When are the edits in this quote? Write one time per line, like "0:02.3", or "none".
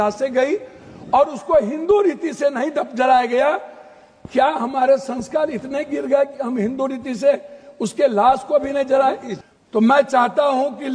0:09.3